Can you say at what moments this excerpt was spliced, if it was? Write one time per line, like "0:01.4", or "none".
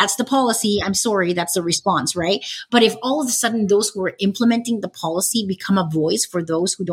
none